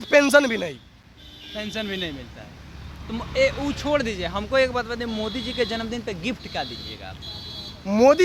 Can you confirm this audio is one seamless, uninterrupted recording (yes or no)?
yes